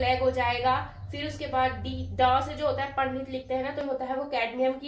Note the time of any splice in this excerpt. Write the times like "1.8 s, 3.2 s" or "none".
3.8 s